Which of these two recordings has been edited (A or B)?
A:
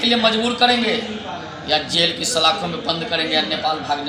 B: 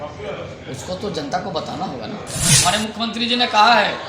B